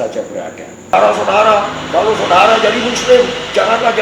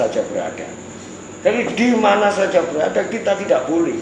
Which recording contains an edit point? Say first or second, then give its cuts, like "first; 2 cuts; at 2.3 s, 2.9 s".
first; 1 cut; at 0.9 s